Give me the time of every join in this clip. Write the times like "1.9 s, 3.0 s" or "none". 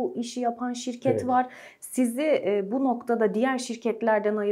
none